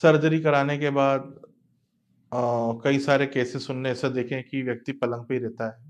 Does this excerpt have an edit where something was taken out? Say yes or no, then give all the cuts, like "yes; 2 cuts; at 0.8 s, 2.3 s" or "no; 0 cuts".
no; 0 cuts